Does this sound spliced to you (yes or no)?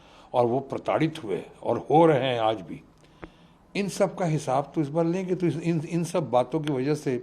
no